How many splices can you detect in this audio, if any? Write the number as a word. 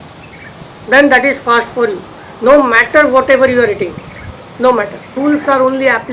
one